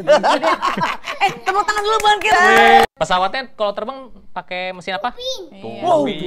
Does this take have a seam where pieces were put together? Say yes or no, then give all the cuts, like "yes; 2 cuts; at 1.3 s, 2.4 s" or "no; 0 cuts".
yes; 1 cut; at 2.9 s